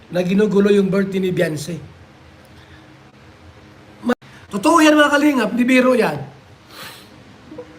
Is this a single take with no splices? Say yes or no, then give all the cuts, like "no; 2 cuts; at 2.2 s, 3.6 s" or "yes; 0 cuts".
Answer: no; 1 cut; at 4.1 s